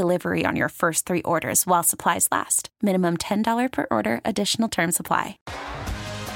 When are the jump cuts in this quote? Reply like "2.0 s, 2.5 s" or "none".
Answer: 5.4 s